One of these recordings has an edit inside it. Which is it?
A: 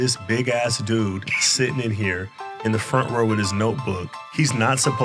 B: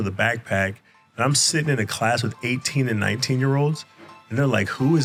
A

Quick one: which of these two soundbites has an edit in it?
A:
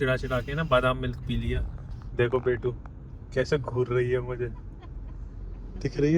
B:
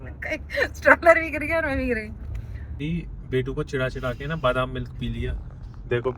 B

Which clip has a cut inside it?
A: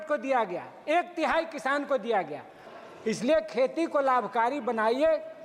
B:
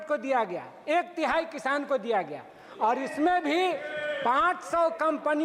A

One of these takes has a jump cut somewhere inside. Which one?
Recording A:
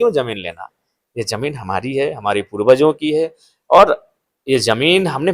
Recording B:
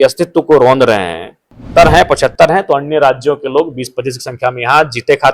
B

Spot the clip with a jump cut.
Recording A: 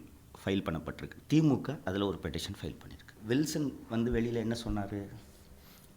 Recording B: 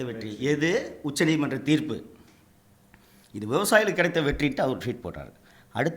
A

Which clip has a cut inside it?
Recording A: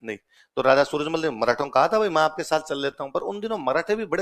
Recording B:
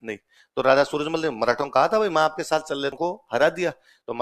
B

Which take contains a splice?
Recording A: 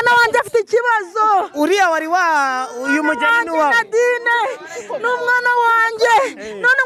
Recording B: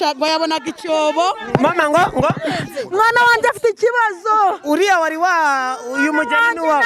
B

